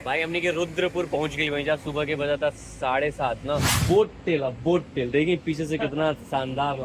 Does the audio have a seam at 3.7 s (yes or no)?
yes